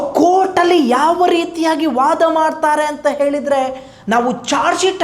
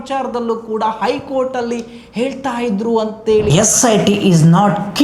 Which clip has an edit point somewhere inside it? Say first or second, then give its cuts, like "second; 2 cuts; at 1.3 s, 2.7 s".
second; 1 cut; at 3.5 s